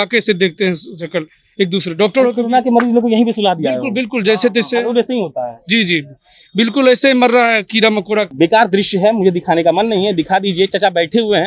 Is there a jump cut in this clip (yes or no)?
yes